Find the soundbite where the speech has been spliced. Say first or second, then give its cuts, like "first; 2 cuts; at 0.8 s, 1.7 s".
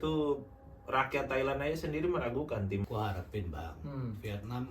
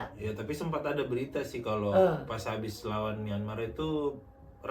first; 1 cut; at 2.8 s